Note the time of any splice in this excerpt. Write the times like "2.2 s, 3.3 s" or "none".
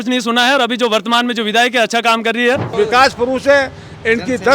2.7 s